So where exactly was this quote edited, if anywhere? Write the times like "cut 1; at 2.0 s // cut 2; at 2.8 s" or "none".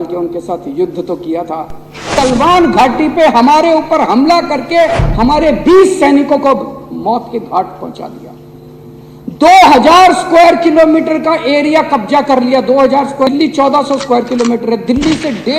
cut 1; at 2.1 s // cut 2; at 13.3 s